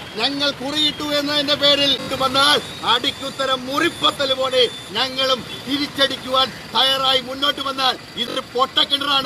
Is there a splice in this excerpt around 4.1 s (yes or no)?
no